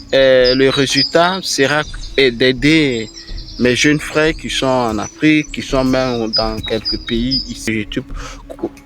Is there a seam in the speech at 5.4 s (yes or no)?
no